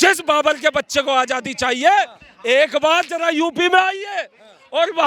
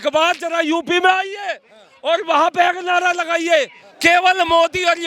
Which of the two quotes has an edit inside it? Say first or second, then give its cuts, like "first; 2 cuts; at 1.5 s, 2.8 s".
second; 1 cut; at 3.8 s